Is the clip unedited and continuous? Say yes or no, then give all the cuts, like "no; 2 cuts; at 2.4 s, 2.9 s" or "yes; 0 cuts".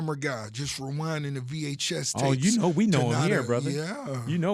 yes; 0 cuts